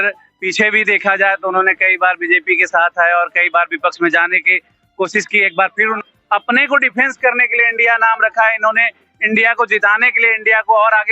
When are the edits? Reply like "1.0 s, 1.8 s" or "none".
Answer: 6.0 s